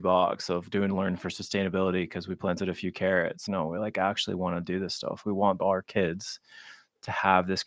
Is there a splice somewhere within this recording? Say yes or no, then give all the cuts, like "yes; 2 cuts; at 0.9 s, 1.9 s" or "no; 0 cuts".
yes; 2 cuts; at 3.4 s, 5.3 s